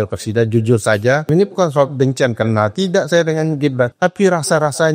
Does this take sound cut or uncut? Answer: cut